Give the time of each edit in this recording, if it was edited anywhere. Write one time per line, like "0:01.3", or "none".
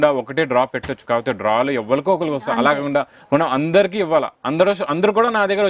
none